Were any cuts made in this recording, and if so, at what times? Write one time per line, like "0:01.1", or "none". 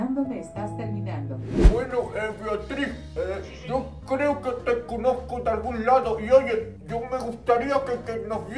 0:01.6